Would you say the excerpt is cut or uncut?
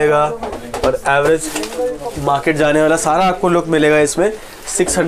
uncut